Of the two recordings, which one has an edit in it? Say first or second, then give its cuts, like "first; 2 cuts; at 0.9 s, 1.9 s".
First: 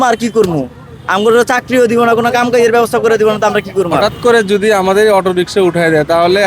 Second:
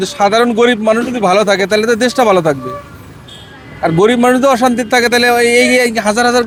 first; 1 cut; at 3.9 s